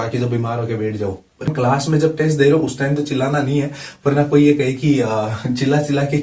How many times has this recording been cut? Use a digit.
1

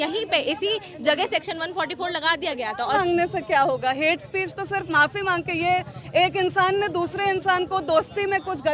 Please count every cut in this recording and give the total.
1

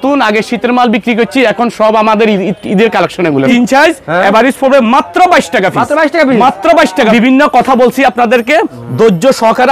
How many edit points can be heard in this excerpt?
2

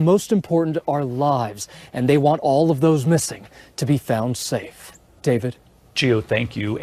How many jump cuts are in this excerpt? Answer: 0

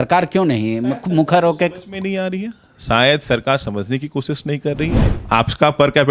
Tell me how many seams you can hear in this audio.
1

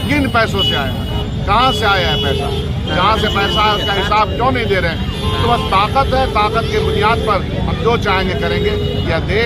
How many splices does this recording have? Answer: 0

